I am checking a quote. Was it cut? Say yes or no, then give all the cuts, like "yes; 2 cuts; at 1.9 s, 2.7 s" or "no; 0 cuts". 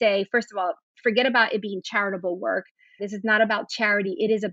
yes; 1 cut; at 3.0 s